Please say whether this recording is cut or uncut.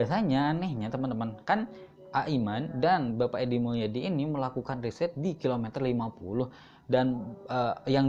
uncut